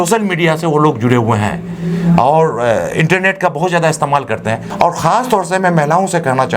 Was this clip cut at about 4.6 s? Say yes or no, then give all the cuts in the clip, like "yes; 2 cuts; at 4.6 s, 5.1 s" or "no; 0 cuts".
yes; 1 cut; at 4.6 s